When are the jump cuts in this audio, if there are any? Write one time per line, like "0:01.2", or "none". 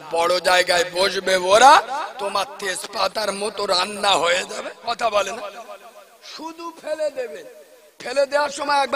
0:04.7